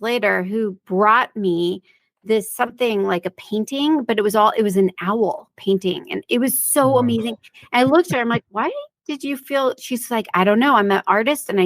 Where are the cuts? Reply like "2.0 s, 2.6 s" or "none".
none